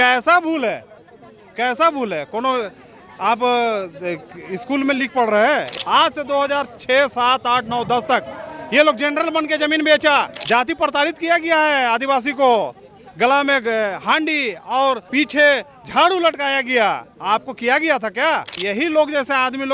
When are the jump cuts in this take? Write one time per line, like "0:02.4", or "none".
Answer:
0:05.8
0:10.4
0:15.0
0:18.6